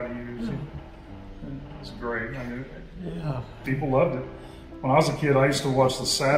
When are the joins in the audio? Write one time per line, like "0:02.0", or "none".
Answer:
none